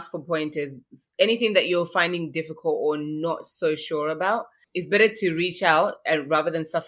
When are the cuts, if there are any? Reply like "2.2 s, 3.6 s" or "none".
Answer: 4.6 s